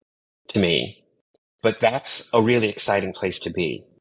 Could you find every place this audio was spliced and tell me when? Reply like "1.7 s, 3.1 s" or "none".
none